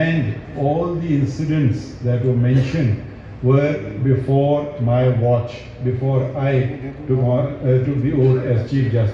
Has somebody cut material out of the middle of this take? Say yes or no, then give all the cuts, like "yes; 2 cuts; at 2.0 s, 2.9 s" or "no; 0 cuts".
no; 0 cuts